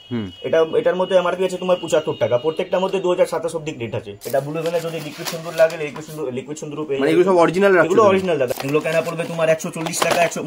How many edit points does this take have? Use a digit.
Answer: 2